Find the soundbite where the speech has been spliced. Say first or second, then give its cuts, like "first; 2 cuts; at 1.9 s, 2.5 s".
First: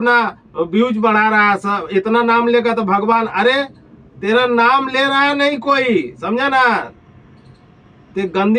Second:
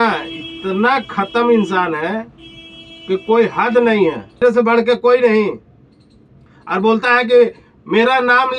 second; 1 cut; at 4.4 s